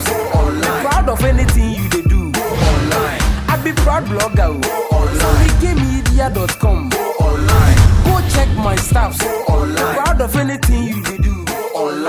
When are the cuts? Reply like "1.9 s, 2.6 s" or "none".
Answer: none